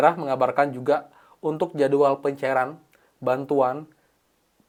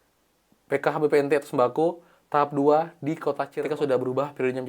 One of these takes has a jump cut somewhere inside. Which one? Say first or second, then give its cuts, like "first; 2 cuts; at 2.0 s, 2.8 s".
second; 1 cut; at 3.5 s